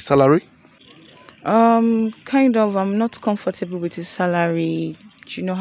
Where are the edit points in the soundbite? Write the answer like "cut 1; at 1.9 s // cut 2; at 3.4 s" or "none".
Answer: none